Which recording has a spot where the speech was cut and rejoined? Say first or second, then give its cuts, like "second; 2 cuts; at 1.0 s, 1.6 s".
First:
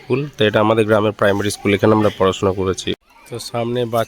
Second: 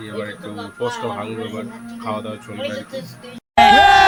first; 1 cut; at 2.9 s